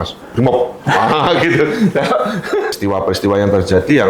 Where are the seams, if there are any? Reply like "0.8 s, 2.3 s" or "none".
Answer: 2.7 s